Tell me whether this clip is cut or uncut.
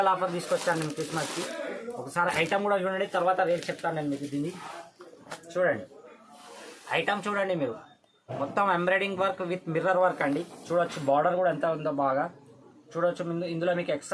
uncut